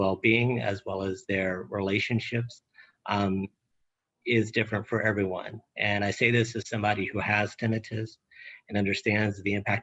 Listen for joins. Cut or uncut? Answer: uncut